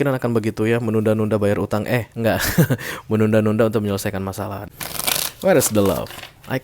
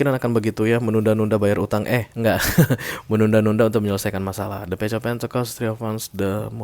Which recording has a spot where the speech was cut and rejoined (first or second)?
first